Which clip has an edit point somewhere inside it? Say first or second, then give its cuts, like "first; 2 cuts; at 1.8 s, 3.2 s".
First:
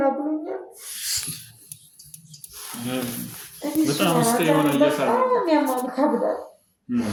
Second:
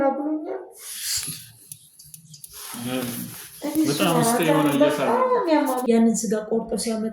second; 1 cut; at 5.8 s